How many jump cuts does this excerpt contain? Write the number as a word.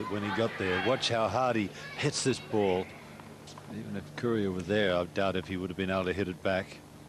one